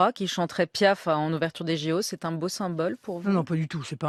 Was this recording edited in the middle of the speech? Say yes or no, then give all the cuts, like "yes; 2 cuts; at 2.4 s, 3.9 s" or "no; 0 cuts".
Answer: no; 0 cuts